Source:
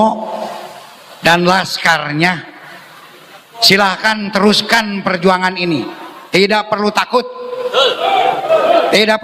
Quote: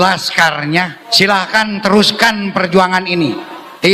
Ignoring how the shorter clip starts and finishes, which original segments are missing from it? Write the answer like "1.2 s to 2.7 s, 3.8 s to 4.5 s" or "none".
2.5 s to 3.5 s